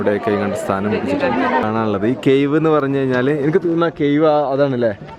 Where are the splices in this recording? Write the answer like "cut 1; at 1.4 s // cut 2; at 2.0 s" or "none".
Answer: cut 1; at 1.6 s